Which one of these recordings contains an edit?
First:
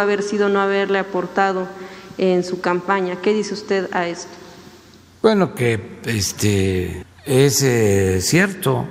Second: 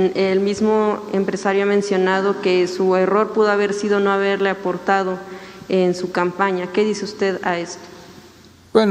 first; 1 cut; at 7.1 s

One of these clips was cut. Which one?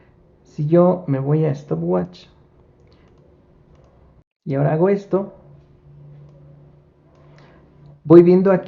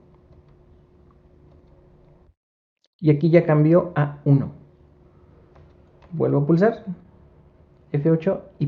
first; 1 cut; at 4.3 s

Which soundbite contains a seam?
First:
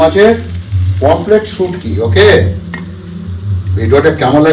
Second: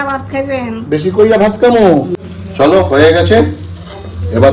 second; 1 cut; at 2.2 s

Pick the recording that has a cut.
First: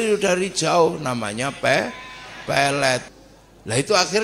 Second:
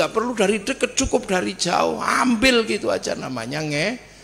first; 1 cut; at 3.1 s

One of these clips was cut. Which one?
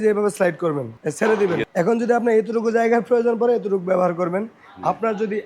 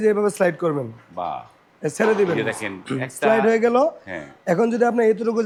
first; 2 cuts; at 0.9 s, 1.7 s

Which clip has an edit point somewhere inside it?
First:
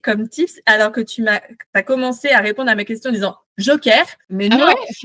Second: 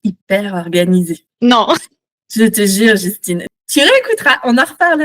second; 1 cut; at 3.5 s

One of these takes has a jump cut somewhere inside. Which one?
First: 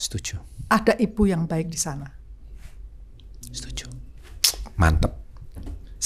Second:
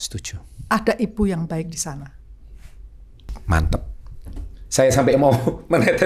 second; 1 cut; at 3.3 s

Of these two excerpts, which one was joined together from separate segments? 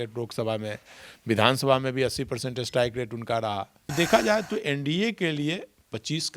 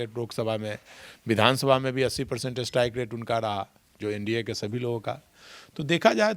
first; 1 cut; at 3.8 s

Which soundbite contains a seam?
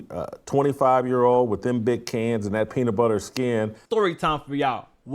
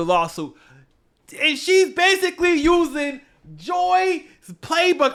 first; 1 cut; at 3.8 s

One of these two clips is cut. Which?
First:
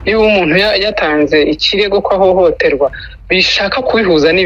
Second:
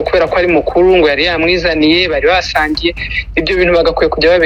first; 1 cut; at 0.9 s

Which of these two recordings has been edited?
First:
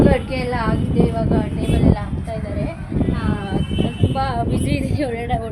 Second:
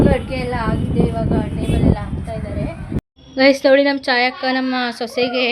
second; 1 cut; at 3.0 s

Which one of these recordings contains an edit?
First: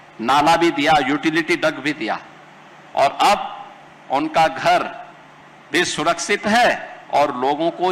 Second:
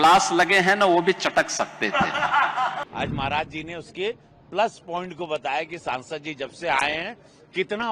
second; 1 cut; at 2.9 s

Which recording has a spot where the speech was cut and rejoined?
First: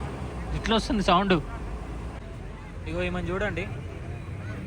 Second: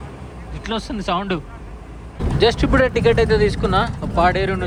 first; 1 cut; at 2.0 s

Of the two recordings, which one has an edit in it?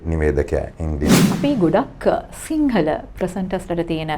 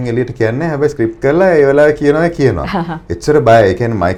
first; 1 cut; at 1.2 s

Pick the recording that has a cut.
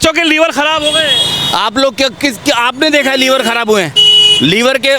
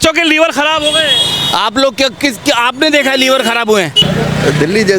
second; 1 cut; at 4.0 s

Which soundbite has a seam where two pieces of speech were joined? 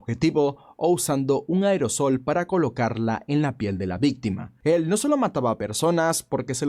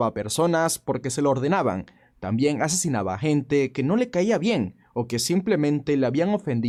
first; 1 cut; at 4.5 s

